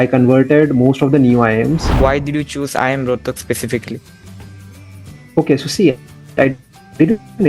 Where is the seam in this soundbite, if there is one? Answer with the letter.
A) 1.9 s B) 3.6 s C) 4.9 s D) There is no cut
A